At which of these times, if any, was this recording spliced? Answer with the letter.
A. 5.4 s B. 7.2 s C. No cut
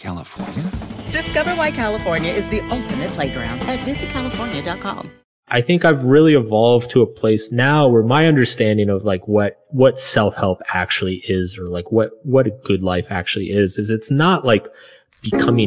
A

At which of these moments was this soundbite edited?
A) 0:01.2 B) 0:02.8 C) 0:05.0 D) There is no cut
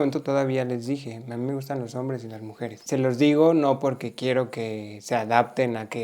B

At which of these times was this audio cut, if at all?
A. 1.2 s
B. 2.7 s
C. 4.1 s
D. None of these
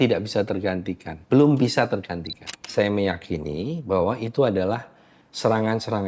B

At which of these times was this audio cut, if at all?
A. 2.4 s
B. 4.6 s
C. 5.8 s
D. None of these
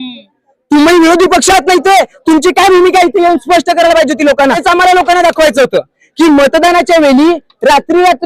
B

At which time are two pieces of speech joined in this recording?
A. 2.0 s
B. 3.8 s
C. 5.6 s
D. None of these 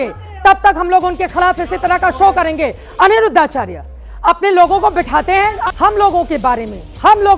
C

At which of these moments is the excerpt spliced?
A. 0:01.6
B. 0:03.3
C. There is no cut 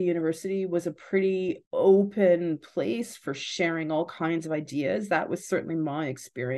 A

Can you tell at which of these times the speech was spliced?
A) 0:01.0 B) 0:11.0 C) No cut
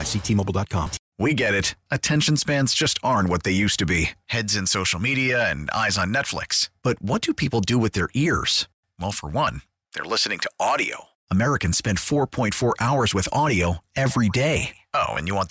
A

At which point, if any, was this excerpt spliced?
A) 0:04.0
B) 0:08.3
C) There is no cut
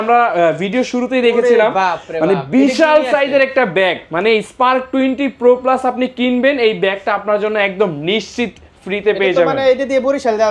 C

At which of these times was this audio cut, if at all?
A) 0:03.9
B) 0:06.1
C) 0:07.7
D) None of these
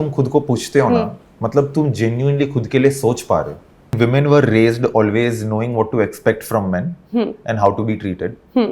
A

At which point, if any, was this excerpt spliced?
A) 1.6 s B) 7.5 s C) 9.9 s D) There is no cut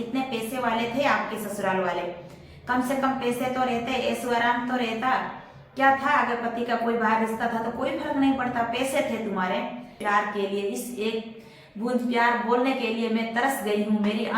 C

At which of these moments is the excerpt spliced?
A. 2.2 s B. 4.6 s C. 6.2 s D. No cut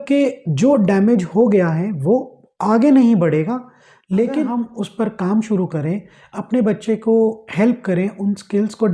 B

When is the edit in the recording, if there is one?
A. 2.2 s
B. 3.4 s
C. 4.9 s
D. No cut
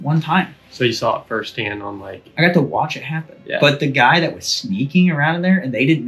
D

